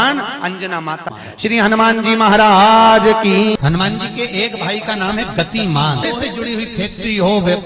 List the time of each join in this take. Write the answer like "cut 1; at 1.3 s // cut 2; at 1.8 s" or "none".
cut 1; at 1.1 s // cut 2; at 3.6 s // cut 3; at 6.1 s